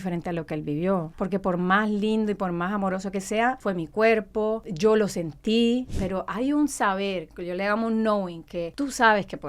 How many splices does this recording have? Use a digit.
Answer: 5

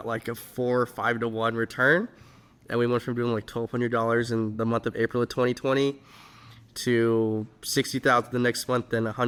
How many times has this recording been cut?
0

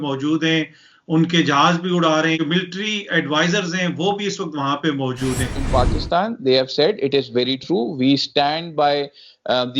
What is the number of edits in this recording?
2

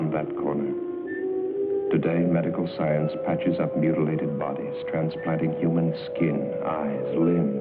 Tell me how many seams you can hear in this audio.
0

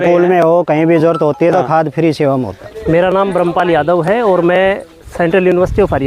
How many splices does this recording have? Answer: 1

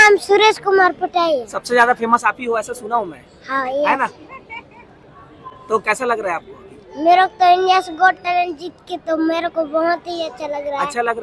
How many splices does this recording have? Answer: 0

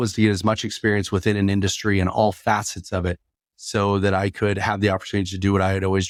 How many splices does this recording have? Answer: 0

